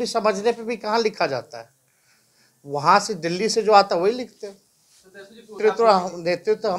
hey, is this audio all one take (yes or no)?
no